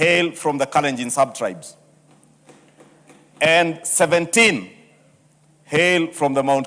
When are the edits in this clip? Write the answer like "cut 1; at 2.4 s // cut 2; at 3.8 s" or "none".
none